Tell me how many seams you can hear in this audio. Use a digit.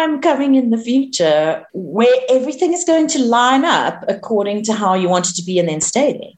1